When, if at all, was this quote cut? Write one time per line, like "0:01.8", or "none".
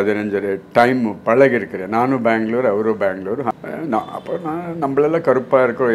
0:03.5